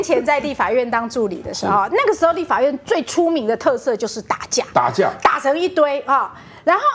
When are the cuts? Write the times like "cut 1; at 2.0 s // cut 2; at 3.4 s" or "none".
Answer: none